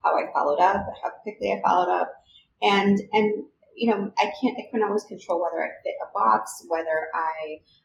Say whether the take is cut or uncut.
uncut